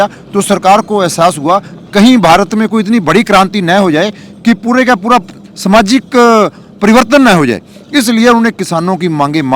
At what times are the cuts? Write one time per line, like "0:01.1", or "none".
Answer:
none